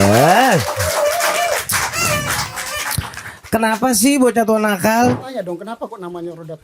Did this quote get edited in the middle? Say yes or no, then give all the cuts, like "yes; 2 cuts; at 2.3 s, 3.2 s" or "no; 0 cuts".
yes; 1 cut; at 5.2 s